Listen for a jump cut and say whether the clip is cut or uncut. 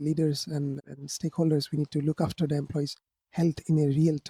uncut